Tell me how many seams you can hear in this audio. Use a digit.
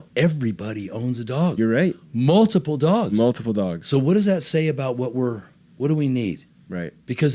0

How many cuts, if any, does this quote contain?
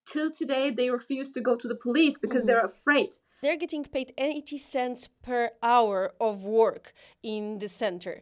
1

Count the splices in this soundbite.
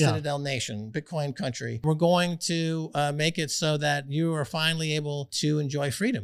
2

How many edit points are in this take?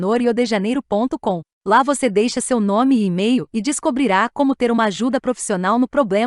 0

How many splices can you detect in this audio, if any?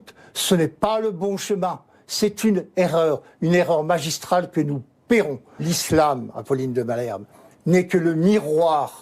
1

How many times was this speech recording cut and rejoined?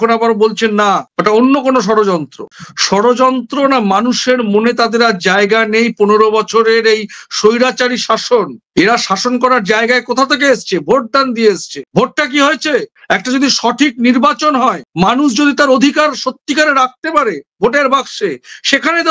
0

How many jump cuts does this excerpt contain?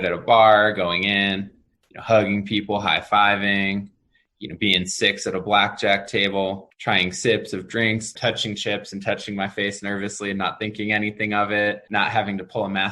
2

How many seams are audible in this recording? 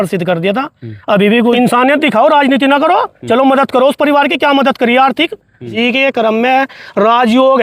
2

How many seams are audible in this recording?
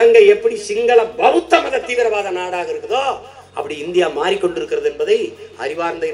0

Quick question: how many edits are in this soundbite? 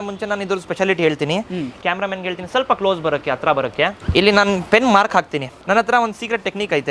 2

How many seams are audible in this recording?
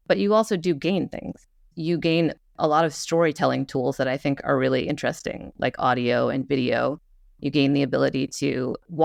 0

